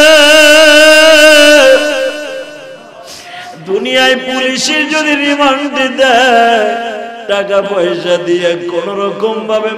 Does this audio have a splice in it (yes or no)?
no